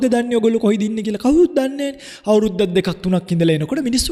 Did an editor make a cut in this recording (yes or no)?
no